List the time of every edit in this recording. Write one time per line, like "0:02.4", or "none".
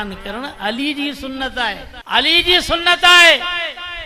0:01.9